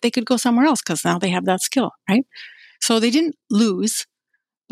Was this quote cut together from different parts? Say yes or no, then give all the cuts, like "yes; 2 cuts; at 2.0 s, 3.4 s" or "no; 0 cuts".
no; 0 cuts